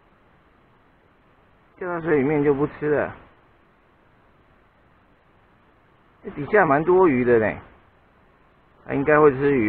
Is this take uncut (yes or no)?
yes